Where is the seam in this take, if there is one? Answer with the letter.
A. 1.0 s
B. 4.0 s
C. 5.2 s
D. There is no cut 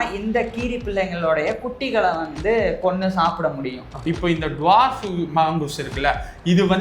B